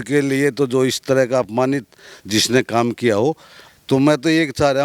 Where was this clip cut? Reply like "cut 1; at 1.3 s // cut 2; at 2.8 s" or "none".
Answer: cut 1; at 3.7 s